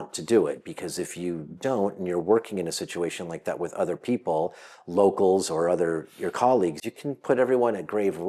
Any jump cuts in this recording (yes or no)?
no